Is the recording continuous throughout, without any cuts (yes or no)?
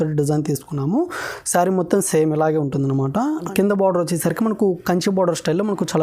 no